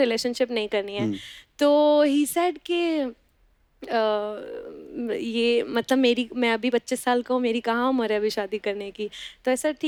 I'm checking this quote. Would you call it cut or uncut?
uncut